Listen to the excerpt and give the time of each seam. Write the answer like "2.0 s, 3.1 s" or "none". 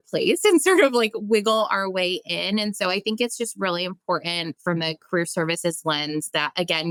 none